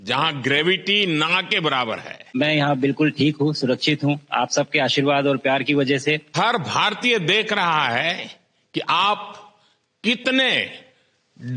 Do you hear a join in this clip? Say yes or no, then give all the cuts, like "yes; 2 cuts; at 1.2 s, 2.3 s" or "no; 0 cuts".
yes; 2 cuts; at 2.6 s, 6.3 s